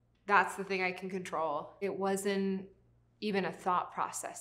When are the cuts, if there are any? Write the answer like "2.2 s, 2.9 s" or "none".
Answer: 1.9 s